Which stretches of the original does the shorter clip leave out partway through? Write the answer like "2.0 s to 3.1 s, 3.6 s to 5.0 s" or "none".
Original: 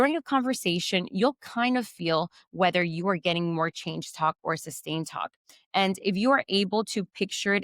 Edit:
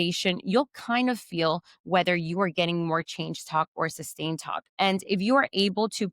5.3 s to 5.5 s

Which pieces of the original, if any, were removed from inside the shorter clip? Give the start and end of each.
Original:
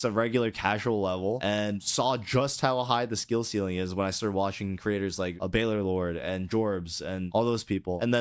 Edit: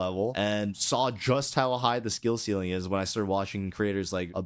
none

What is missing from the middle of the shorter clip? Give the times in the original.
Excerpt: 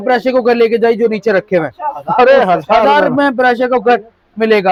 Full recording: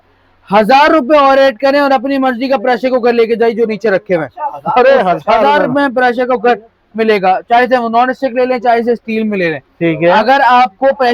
none

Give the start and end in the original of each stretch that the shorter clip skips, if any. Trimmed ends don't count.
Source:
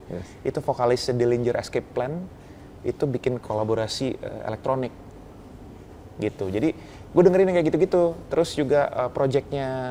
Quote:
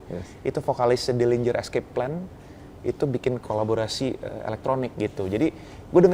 4.9 s to 6.2 s

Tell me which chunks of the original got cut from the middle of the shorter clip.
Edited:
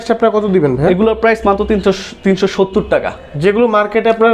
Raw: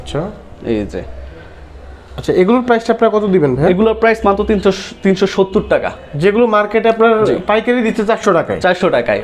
none

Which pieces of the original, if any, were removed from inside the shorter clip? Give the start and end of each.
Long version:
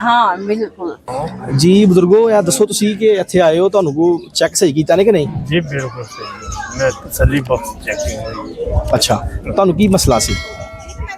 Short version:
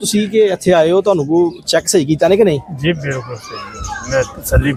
none

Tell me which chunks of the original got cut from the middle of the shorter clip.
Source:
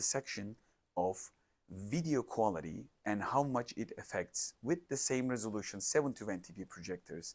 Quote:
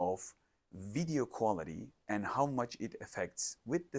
none

